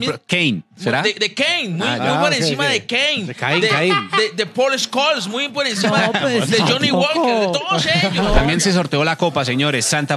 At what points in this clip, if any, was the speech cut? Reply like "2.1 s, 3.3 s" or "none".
8.4 s